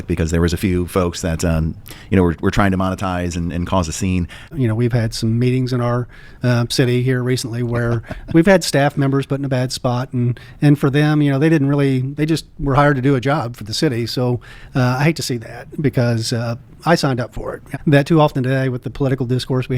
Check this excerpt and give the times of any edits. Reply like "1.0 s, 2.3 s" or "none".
4.5 s, 14.5 s, 17.6 s

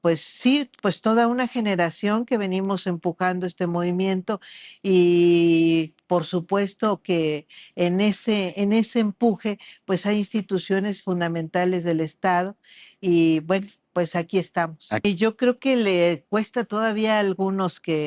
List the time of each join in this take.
15.0 s

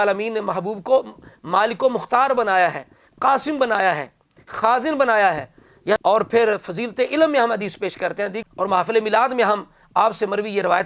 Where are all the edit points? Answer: 6.0 s, 8.4 s

